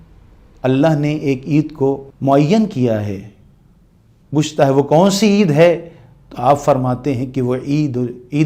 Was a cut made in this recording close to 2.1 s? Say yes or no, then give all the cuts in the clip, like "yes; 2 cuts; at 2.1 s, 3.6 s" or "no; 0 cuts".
yes; 1 cut; at 2.1 s